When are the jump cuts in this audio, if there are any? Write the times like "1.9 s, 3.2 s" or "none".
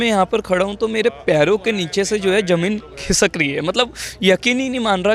none